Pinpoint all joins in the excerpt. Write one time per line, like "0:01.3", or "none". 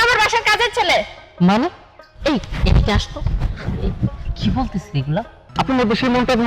0:05.4